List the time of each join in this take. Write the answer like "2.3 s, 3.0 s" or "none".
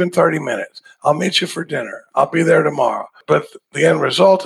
3.2 s